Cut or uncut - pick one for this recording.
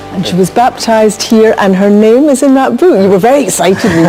uncut